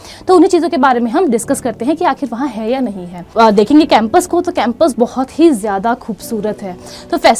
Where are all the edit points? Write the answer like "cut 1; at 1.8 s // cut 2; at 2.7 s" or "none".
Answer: cut 1; at 3.2 s